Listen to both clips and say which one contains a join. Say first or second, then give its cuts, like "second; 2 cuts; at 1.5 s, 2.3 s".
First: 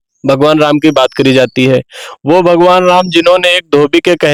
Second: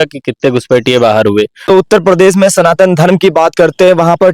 second; 1 cut; at 1.7 s